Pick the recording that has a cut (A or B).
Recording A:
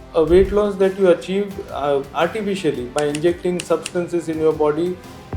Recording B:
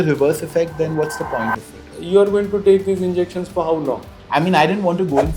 B